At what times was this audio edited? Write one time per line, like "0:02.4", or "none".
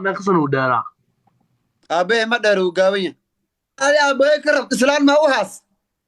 0:03.8